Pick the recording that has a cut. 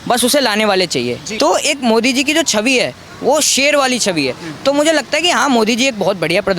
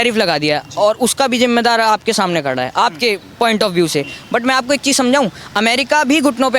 first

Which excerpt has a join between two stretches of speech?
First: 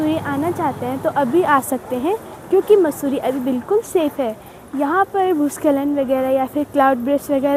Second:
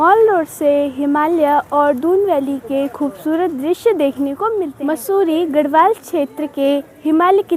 second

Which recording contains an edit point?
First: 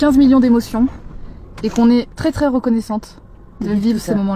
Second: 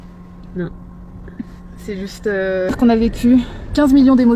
second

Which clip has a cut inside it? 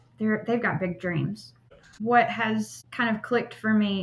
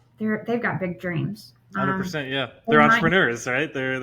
first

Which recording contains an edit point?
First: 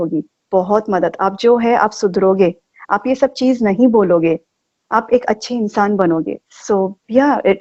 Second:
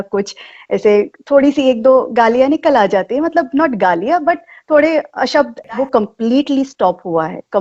second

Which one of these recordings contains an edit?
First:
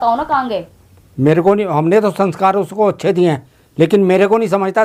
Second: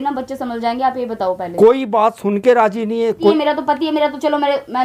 second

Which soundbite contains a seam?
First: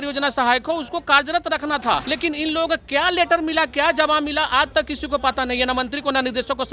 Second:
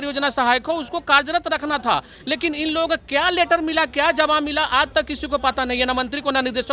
first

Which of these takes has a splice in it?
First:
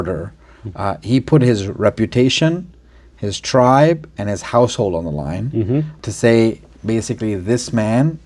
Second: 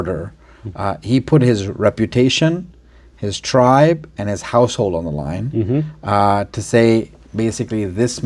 first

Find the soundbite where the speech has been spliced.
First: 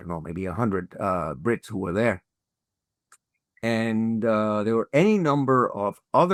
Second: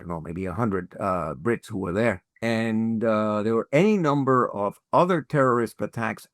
second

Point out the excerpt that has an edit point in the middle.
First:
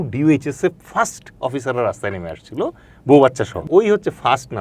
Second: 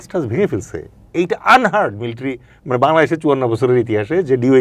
first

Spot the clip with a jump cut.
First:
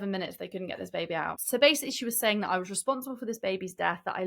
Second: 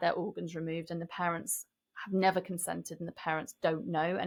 first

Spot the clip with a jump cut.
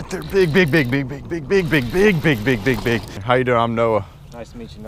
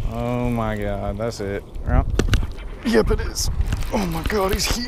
first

